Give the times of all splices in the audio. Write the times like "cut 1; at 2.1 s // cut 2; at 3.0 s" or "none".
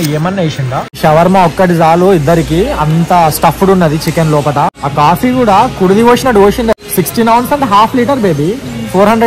cut 1; at 1.0 s // cut 2; at 4.8 s // cut 3; at 6.7 s